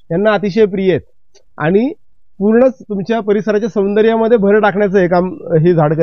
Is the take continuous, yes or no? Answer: yes